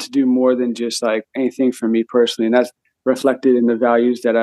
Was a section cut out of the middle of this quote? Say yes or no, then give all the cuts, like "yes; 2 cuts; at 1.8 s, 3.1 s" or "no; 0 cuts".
no; 0 cuts